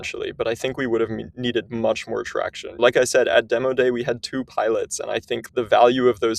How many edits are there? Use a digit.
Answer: 2